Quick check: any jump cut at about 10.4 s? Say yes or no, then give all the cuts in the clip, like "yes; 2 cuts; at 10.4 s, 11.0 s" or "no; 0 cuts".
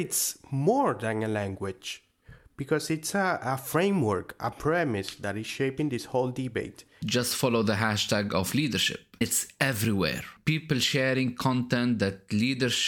yes; 3 cuts; at 7.0 s, 9.2 s, 10.4 s